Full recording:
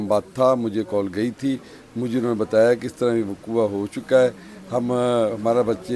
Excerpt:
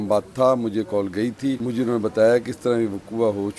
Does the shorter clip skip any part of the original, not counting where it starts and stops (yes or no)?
yes